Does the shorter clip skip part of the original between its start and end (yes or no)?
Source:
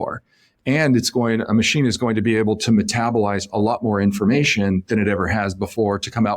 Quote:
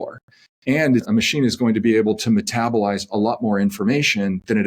yes